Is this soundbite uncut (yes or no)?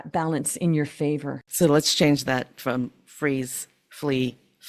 no